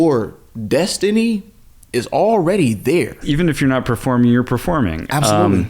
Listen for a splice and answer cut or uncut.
cut